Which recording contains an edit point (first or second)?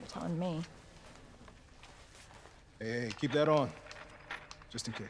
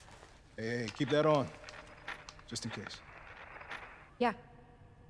second